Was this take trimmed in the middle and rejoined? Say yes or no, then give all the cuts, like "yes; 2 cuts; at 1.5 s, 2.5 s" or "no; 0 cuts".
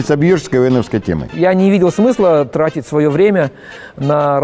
yes; 1 cut; at 1.2 s